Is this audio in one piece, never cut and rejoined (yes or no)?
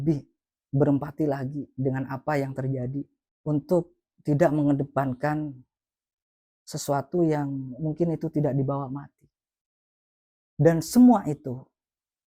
no